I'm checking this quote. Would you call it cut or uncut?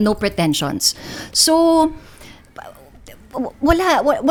uncut